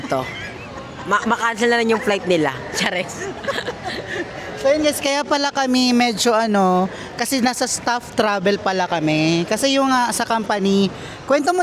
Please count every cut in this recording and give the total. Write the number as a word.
zero